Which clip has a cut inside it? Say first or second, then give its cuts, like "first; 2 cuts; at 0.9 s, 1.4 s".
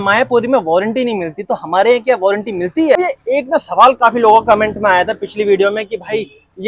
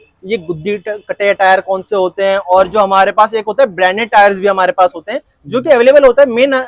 first; 1 cut; at 3.0 s